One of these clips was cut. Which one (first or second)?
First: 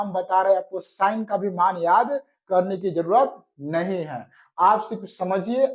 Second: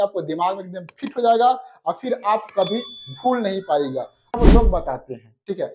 second